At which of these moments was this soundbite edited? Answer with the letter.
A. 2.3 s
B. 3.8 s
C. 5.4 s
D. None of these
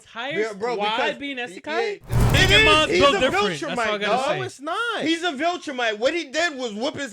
A